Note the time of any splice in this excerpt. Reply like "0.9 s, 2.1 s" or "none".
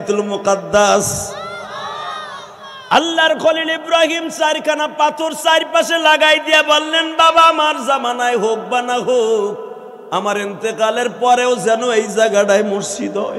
none